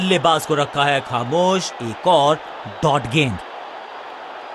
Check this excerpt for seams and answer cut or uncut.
uncut